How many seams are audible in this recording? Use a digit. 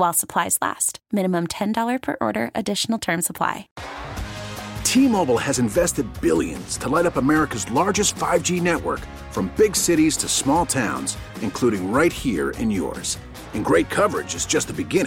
1